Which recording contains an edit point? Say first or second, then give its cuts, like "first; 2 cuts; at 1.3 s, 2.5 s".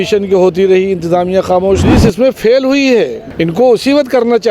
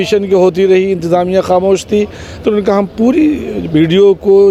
first; 2 cuts; at 1.9 s, 3.2 s